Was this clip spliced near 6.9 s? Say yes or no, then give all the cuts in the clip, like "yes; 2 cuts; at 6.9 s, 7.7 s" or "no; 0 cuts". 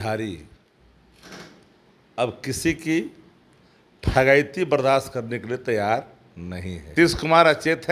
yes; 1 cut; at 6.9 s